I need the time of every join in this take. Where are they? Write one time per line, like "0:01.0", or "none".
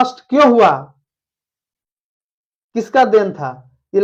none